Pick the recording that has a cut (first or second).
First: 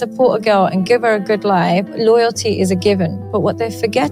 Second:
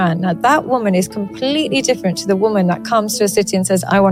first